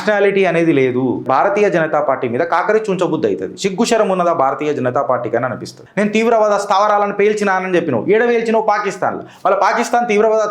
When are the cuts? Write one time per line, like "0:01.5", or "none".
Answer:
0:01.2
0:05.8